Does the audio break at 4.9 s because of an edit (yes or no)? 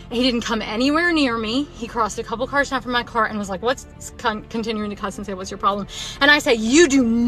no